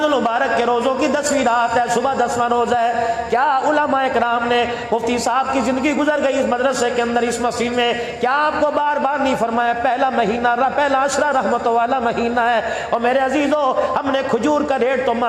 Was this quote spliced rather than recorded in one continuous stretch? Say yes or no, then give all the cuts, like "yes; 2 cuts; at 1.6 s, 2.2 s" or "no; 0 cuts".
no; 0 cuts